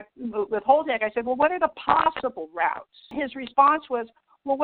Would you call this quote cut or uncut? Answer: cut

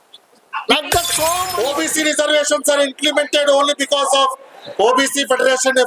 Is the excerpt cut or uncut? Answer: cut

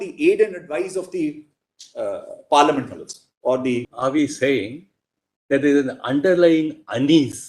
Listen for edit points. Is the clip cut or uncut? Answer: cut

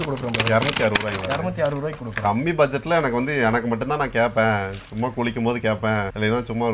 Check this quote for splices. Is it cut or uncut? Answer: uncut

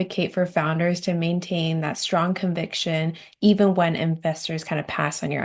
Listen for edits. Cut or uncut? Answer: uncut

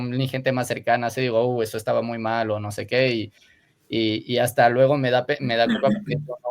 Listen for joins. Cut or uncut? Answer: uncut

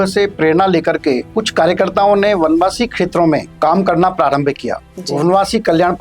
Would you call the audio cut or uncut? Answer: cut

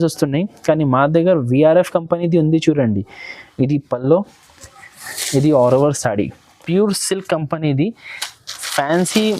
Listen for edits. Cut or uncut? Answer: cut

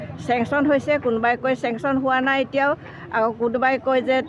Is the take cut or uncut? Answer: uncut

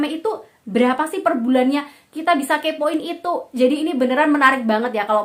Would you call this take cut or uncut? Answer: uncut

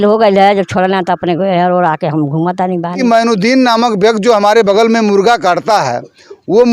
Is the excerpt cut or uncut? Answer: cut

